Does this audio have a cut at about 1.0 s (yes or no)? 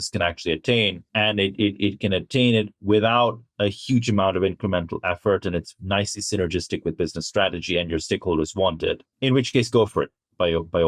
yes